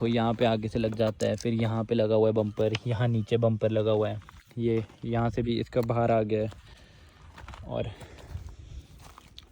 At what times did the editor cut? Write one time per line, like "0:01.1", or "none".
none